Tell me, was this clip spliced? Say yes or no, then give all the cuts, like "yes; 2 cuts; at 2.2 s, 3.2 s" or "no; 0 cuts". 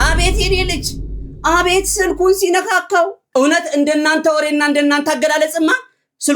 yes; 1 cut; at 3.2 s